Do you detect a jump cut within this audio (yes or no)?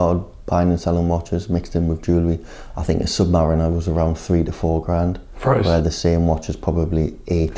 no